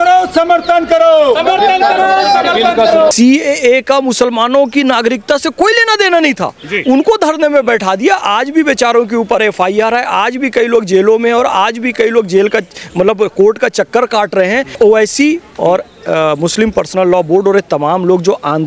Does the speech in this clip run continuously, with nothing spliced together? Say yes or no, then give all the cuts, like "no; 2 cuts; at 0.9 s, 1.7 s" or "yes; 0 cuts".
no; 2 cuts; at 3.1 s, 14.7 s